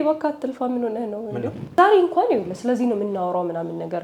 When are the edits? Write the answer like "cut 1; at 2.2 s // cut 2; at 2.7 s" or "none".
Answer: cut 1; at 1.8 s